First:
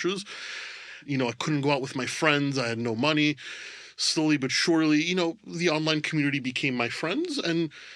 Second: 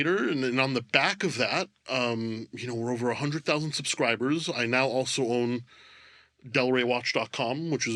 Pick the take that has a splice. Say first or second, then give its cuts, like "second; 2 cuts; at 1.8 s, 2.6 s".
first; 1 cut; at 1.0 s